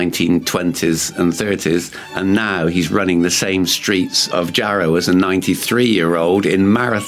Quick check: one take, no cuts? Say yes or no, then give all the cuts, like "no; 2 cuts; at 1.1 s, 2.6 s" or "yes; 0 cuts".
no; 1 cut; at 4.3 s